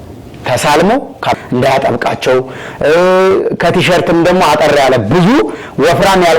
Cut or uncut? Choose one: cut